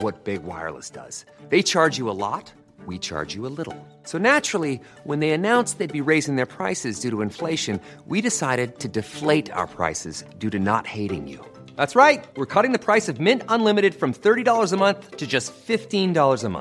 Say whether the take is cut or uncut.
uncut